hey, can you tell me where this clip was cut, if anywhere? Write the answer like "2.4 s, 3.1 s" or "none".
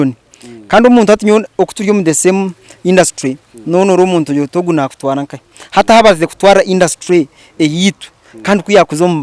none

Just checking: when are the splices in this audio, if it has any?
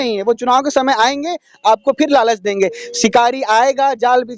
none

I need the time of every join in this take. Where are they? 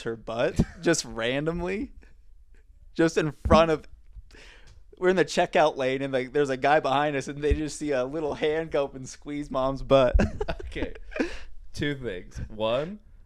none

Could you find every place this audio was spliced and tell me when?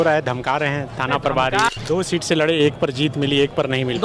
1.7 s

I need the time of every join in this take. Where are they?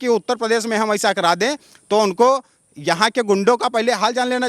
none

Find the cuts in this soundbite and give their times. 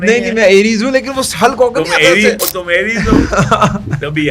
2.5 s

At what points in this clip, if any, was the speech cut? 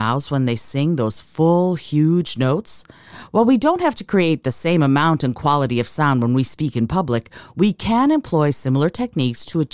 none

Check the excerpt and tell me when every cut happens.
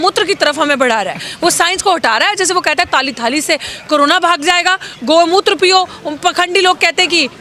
none

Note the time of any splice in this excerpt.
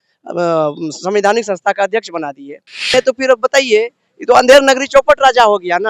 2.9 s

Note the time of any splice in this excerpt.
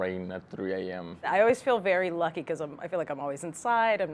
1.3 s

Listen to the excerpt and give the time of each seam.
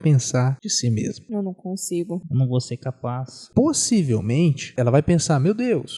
1.0 s, 2.3 s, 3.3 s, 4.7 s

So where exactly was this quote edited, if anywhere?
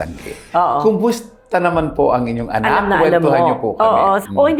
none

